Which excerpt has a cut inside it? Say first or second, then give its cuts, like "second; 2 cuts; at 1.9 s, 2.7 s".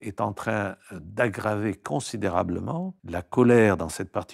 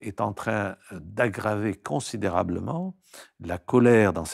first; 1 cut; at 3.0 s